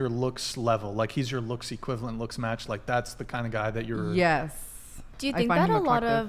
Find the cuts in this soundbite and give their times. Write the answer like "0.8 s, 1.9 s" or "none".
5.1 s